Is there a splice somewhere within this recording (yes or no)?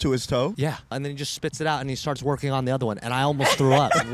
yes